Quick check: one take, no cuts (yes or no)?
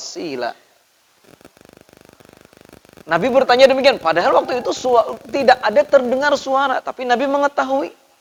yes